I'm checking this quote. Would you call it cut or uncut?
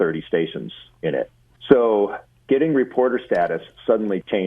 cut